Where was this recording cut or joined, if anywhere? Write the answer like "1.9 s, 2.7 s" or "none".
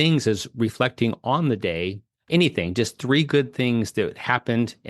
2.1 s